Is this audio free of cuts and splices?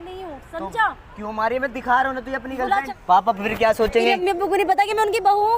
no; 1 cut; at 2.9 s

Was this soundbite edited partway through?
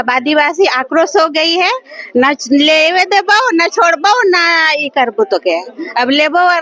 no; 0 cuts

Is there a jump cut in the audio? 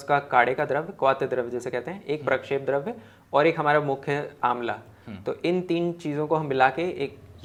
no; 0 cuts

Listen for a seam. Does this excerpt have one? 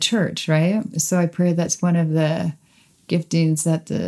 yes; 1 cut; at 1.0 s

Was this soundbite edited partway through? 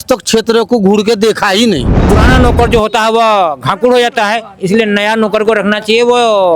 yes; 1 cut; at 2.0 s

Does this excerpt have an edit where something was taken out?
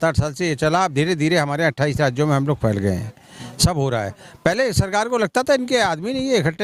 no; 0 cuts

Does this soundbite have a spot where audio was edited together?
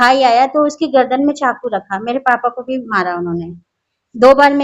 no; 0 cuts

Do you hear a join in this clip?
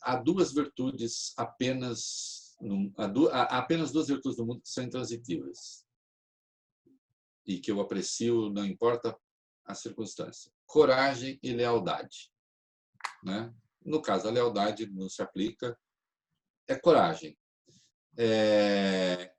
no; 0 cuts

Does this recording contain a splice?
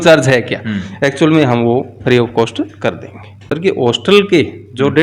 yes; 1 cut; at 3.5 s

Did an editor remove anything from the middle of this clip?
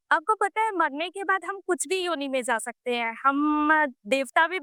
no; 0 cuts

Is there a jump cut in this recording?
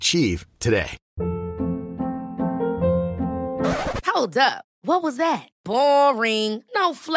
yes; 1 cut; at 1.0 s

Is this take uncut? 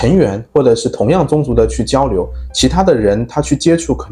yes; 0 cuts

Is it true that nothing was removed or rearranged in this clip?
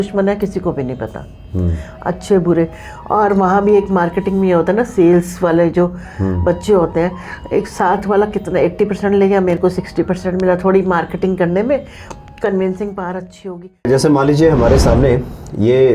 no; 1 cut; at 13.9 s

